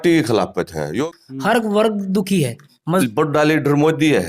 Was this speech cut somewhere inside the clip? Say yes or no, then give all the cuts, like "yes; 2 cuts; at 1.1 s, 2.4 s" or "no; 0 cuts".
yes; 2 cuts; at 1.0 s, 3.0 s